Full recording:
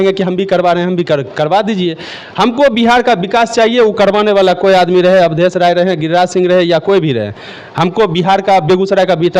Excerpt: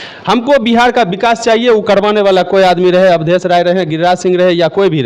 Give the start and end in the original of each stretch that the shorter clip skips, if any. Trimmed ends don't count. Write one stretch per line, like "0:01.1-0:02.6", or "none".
none